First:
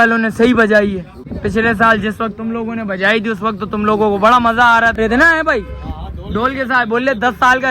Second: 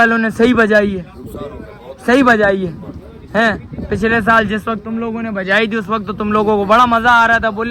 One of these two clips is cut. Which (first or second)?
first